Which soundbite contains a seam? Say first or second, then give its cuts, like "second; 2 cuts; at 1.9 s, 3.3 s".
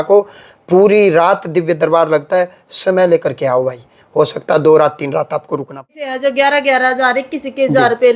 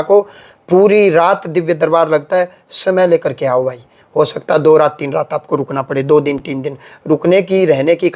first; 1 cut; at 5.9 s